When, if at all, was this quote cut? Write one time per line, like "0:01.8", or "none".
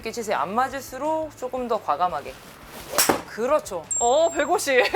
0:03.9